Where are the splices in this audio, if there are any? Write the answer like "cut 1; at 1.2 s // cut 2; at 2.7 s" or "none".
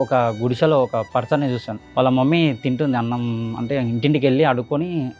cut 1; at 1.8 s